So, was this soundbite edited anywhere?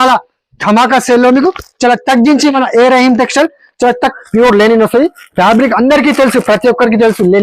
yes; 1 cut; at 4.1 s

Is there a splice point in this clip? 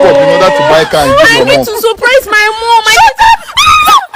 no; 0 cuts

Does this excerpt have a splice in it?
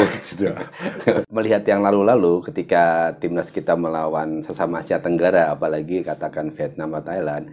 yes; 1 cut; at 1.3 s

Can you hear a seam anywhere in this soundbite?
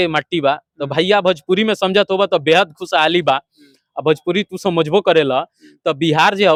no; 0 cuts

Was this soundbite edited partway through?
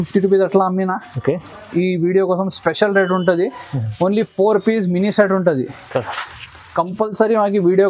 no; 0 cuts

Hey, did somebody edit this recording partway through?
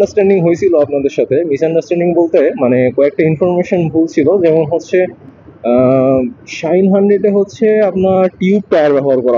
no; 0 cuts

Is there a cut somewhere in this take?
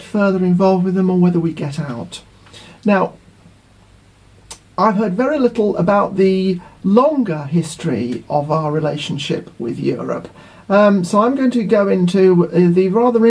no; 0 cuts

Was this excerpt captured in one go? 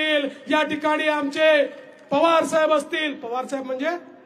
yes; 0 cuts

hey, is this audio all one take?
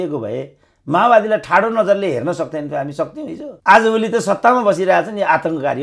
yes; 0 cuts

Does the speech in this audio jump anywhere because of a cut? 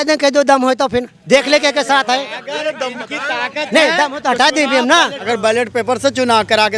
yes; 1 cut; at 5.2 s

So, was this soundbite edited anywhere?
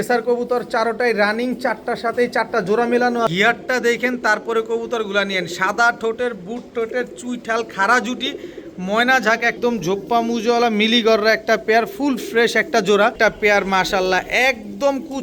yes; 3 cuts; at 3.3 s, 9.6 s, 13.2 s

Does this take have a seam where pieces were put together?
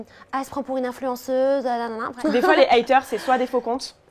yes; 1 cut; at 2.0 s

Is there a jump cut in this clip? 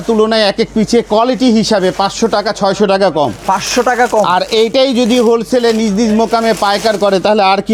no; 0 cuts

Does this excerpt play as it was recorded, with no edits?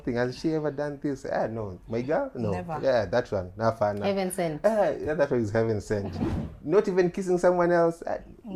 yes; 0 cuts

